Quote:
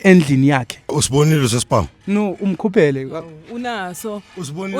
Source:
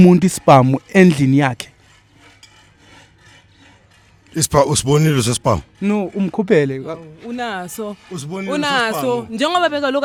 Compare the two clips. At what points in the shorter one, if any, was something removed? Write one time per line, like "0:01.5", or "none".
0:00.9